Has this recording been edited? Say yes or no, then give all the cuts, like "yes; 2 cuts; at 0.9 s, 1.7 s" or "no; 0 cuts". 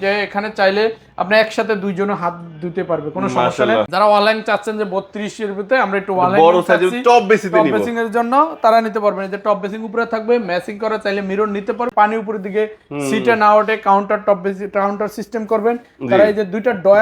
yes; 2 cuts; at 3.9 s, 11.9 s